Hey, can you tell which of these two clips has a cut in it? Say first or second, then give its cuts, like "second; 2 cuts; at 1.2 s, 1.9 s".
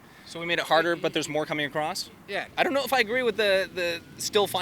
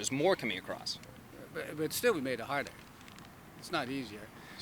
first; 1 cut; at 2.5 s